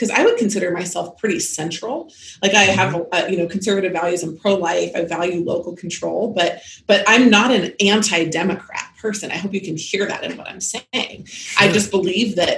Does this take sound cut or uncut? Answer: uncut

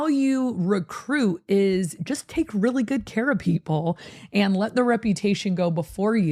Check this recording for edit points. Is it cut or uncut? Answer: uncut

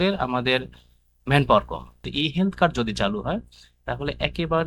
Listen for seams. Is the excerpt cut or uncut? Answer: cut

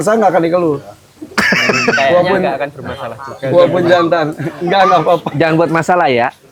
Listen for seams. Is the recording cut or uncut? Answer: uncut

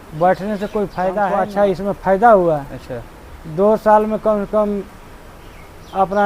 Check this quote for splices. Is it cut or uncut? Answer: cut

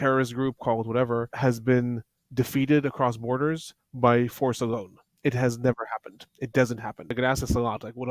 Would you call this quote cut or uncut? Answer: cut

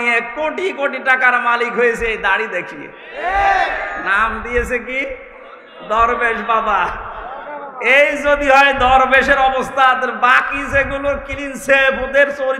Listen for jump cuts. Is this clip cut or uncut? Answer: uncut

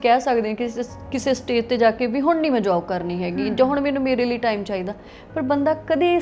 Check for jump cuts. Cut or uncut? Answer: uncut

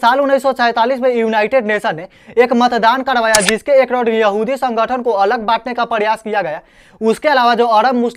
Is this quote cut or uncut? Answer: uncut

